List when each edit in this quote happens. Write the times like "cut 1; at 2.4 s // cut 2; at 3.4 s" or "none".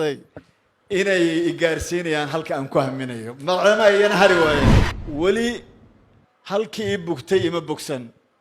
cut 1; at 4.9 s